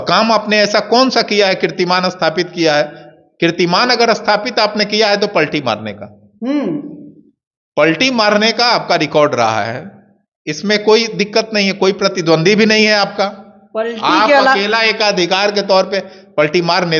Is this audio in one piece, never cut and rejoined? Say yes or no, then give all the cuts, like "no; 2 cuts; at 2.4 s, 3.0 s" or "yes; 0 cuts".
yes; 0 cuts